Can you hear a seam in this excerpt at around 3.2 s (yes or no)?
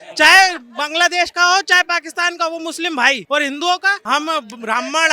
yes